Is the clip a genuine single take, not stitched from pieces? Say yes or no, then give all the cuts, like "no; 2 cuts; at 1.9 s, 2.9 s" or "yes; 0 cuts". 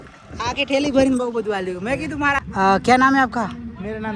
no; 1 cut; at 2.4 s